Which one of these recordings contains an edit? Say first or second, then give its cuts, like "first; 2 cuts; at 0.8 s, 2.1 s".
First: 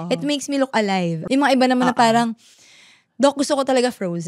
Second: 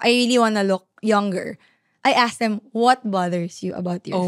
first; 1 cut; at 1.2 s